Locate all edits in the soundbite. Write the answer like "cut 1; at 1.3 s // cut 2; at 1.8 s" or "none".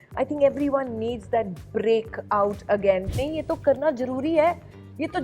cut 1; at 3.1 s